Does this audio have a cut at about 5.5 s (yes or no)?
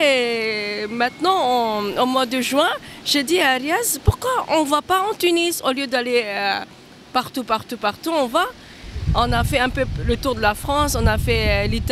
no